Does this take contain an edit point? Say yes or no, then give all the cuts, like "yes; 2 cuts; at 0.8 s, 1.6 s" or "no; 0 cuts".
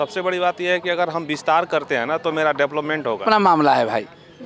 yes; 1 cut; at 3.2 s